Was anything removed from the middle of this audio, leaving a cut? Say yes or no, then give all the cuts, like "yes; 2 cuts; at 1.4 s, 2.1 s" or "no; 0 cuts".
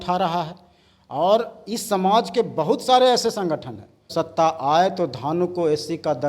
yes; 1 cut; at 4.1 s